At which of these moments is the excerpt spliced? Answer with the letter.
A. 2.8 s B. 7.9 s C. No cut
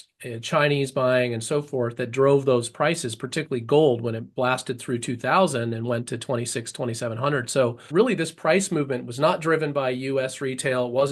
B